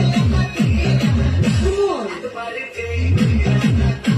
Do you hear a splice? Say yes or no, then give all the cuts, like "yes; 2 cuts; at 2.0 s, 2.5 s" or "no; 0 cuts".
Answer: no; 0 cuts